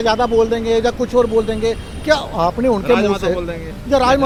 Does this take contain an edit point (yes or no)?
no